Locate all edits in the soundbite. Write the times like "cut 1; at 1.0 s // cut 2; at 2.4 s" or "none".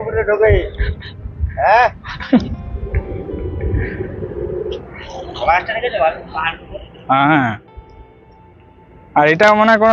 none